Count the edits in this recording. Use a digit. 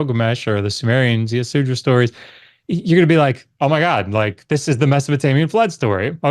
1